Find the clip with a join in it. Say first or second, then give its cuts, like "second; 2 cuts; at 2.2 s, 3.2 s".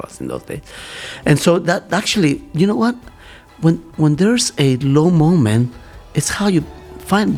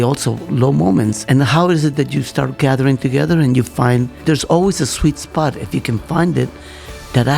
second; 2 cuts; at 1.2 s, 4.1 s